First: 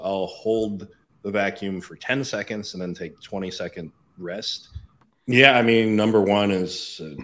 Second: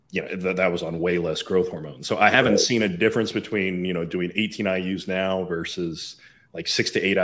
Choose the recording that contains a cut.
first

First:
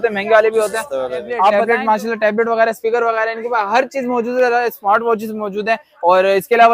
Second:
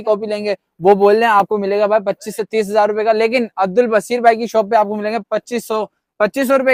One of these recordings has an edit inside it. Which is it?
first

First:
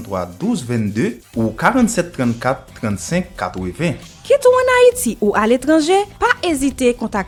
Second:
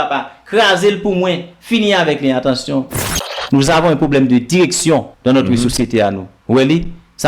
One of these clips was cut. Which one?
second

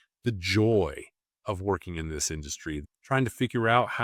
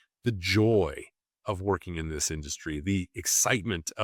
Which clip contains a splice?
first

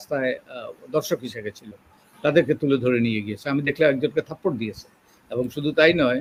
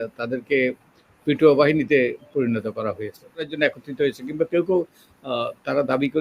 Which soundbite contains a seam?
second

